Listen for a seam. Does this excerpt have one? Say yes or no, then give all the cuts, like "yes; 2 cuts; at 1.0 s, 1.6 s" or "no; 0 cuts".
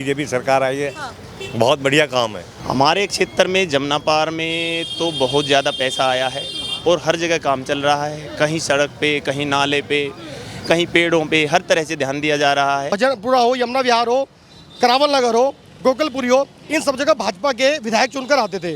yes; 2 cuts; at 2.5 s, 12.9 s